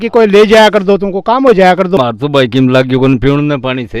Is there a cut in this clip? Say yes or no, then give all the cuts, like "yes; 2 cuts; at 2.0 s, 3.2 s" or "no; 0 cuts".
yes; 1 cut; at 2.0 s